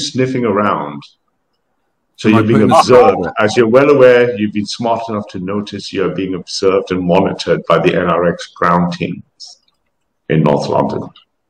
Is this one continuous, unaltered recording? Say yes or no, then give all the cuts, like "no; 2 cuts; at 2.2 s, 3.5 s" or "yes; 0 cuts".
yes; 0 cuts